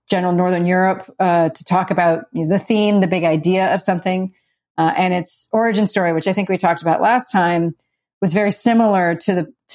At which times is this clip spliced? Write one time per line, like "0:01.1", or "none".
none